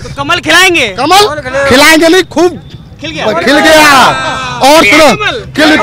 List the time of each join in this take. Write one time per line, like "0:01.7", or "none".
none